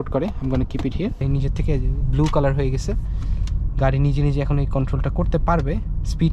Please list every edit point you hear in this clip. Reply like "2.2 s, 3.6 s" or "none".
1.2 s